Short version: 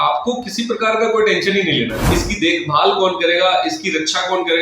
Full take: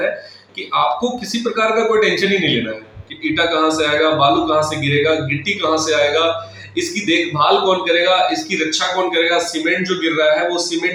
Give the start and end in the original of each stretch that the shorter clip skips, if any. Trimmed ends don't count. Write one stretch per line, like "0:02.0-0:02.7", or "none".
0:02.8-0:06.7